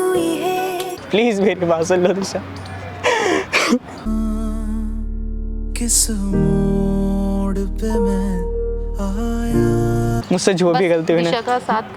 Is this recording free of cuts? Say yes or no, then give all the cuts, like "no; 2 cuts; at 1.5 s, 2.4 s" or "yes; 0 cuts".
no; 2 cuts; at 1.0 s, 10.2 s